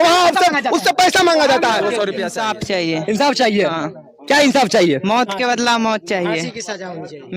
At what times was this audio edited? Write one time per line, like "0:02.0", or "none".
0:02.0